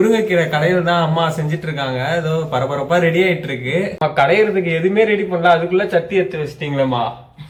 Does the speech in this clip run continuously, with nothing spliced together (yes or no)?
yes